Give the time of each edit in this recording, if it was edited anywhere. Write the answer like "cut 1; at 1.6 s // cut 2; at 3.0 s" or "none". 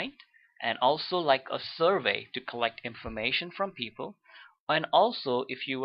cut 1; at 2.3 s